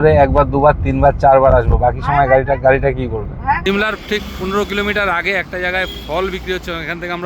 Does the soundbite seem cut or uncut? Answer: cut